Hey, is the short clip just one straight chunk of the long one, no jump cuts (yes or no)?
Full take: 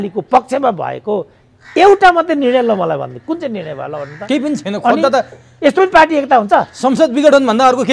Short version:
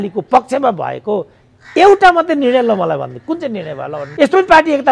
no